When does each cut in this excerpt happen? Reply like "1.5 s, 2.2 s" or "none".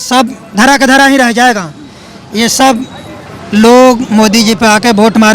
none

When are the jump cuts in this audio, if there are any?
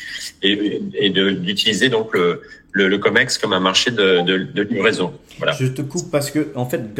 none

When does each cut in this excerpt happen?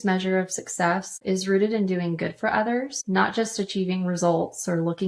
1.1 s, 3.0 s

